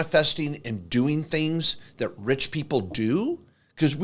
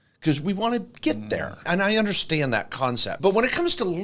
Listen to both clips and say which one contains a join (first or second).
second